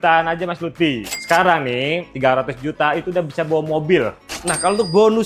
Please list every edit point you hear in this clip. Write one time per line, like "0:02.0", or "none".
0:01.0
0:04.3